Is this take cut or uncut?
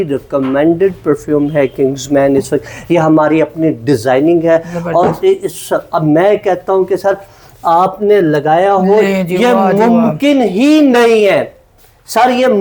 uncut